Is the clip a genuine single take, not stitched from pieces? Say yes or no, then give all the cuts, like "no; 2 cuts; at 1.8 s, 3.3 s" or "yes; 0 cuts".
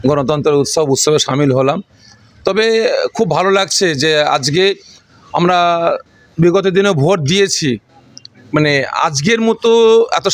yes; 0 cuts